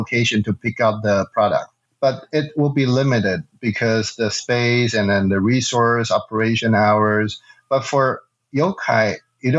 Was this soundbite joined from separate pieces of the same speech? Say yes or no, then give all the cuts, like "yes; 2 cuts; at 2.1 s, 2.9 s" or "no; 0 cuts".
yes; 1 cut; at 1.8 s